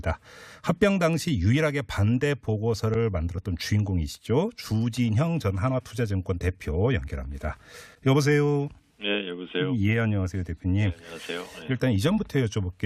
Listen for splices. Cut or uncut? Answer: uncut